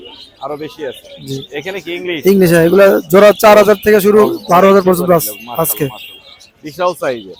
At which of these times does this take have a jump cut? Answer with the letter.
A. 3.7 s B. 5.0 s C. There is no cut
C